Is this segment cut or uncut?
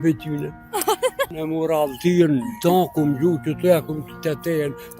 cut